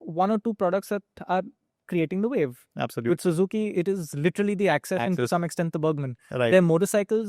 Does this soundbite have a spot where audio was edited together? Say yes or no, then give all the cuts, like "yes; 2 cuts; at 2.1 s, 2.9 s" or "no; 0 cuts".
no; 0 cuts